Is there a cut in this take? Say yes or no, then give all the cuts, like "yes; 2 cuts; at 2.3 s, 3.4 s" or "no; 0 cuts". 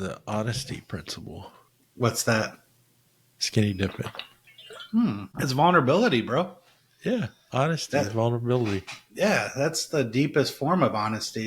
no; 0 cuts